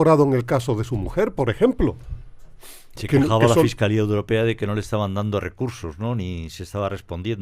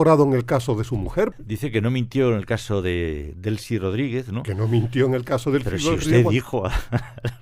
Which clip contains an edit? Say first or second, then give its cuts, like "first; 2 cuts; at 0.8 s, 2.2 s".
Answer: second; 1 cut; at 1.3 s